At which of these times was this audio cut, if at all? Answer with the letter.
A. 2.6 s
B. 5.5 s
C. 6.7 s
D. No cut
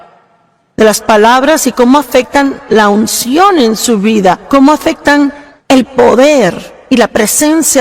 B